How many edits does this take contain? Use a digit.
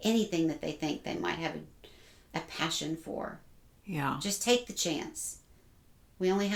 0